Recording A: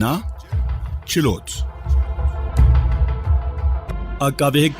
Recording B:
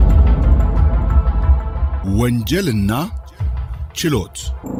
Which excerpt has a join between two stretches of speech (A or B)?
A